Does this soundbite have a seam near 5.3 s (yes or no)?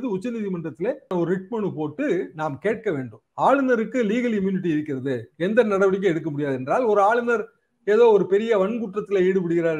no